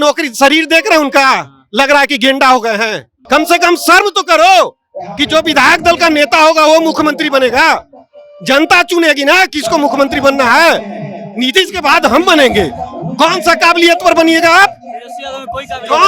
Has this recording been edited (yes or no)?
yes